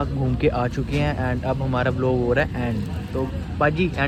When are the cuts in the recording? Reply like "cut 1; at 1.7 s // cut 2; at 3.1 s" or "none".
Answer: none